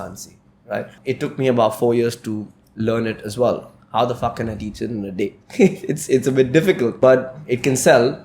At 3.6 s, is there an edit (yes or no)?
no